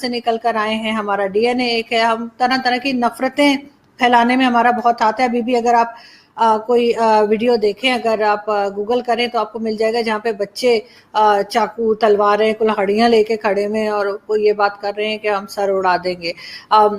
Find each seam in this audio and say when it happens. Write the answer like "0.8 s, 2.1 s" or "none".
none